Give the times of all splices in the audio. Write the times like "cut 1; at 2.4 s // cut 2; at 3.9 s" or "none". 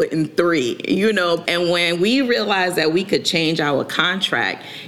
cut 1; at 1.4 s